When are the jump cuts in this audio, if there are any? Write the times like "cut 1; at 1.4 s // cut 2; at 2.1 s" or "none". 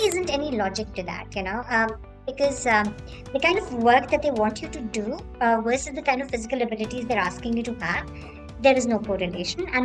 none